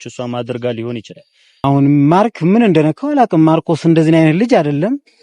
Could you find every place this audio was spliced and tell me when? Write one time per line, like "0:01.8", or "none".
0:01.6